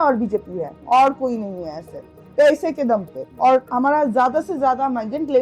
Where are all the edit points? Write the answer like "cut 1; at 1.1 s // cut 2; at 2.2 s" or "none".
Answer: cut 1; at 3.2 s